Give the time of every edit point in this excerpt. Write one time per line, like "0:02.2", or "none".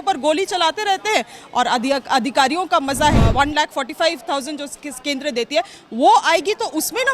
0:03.2

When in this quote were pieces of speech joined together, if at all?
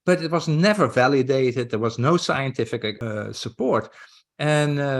0:03.0

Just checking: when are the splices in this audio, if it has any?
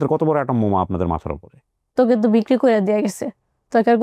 0:01.9

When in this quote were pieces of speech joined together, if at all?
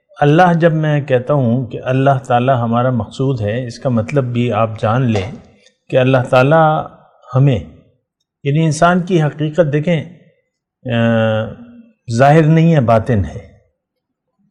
none

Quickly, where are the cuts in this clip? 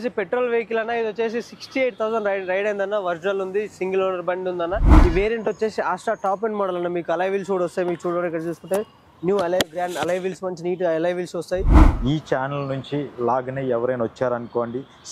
0:04.9
0:11.8

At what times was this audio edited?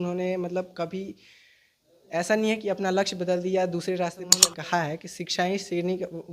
0:04.5

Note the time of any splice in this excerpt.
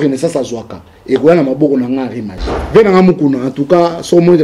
0:02.3

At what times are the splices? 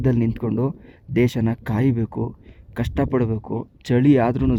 none

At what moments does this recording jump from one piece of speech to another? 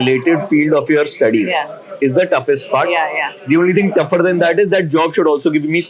none

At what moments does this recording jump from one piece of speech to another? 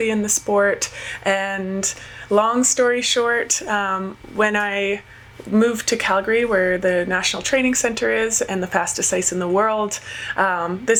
none

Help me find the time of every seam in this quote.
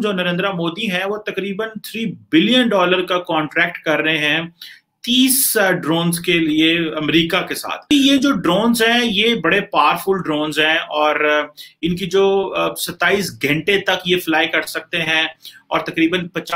0:07.9

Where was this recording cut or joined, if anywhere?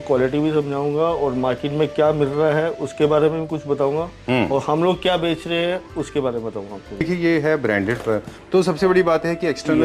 0:07.1

